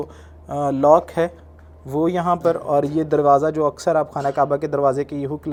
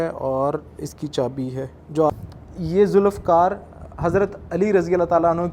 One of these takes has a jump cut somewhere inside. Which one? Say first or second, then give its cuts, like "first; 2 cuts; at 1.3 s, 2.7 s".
second; 1 cut; at 2.1 s